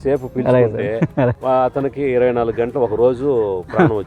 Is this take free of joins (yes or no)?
no